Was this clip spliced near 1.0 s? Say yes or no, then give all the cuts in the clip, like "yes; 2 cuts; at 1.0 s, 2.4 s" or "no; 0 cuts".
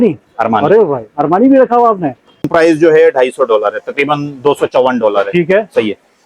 no; 1 cut; at 2.5 s